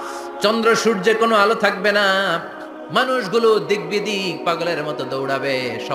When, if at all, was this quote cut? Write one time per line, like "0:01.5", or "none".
none

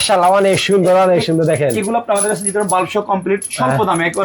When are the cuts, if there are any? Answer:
none

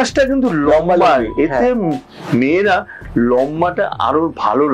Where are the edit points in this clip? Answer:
none

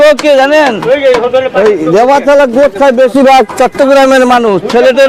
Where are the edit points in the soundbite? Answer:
none

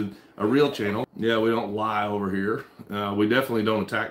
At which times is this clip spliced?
0:01.1

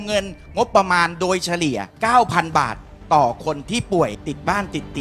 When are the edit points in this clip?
0:01.9

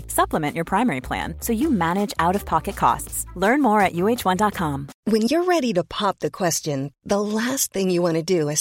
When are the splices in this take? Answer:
0:04.9

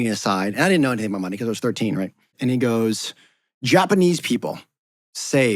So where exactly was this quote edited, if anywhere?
0:02.3

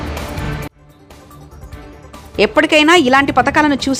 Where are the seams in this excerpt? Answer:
none

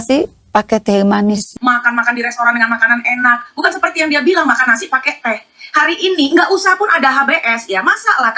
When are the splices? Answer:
0:01.5
0:05.3

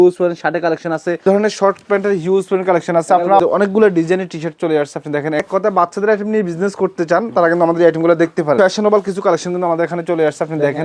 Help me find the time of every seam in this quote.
0:01.2
0:03.4
0:05.5
0:08.6

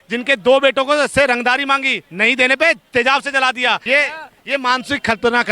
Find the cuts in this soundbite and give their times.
0:03.8

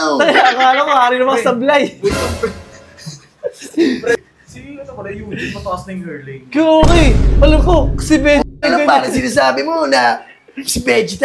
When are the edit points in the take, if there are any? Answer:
0:04.1

